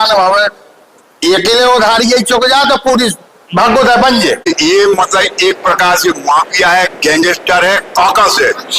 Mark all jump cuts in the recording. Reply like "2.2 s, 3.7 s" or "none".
4.5 s